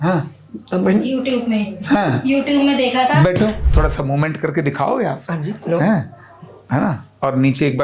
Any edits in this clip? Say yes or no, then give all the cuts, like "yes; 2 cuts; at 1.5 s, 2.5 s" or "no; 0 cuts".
yes; 1 cut; at 3.7 s